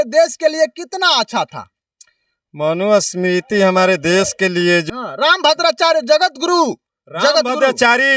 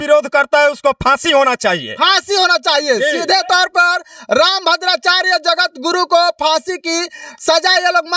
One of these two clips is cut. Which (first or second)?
first